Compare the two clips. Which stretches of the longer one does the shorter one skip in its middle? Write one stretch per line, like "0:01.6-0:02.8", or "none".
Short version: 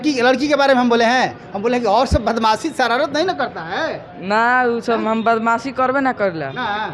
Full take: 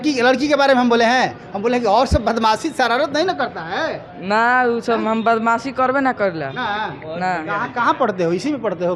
none